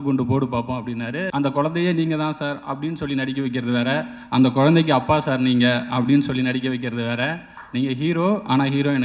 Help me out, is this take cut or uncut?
cut